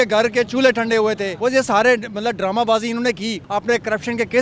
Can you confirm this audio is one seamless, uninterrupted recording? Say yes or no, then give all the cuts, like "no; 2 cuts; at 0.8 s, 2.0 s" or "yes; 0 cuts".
no; 2 cuts; at 1.3 s, 3.4 s